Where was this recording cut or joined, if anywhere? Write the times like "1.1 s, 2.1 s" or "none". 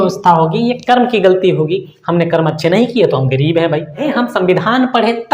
4.1 s